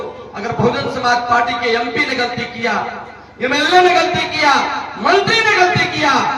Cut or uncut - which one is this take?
uncut